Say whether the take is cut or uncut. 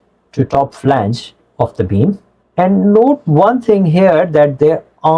cut